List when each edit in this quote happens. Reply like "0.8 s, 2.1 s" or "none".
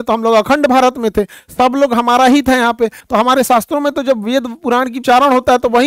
3.0 s, 5.0 s